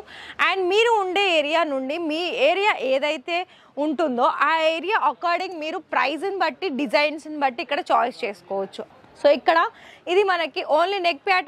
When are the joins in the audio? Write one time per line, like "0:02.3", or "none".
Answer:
0:08.8